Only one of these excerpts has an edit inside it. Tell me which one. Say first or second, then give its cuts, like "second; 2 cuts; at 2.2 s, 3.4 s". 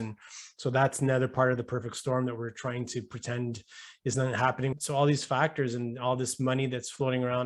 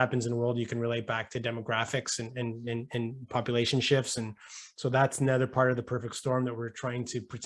first; 1 cut; at 4.7 s